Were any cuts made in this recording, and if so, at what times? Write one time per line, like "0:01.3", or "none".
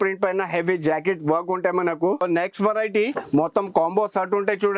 0:02.2